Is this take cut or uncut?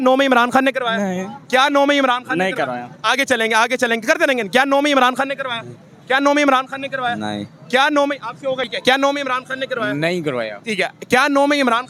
uncut